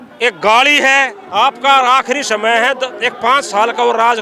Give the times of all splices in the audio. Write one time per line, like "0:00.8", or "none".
0:01.2